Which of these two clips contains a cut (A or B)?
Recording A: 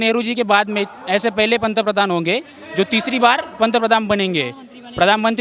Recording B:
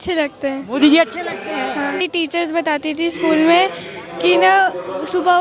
B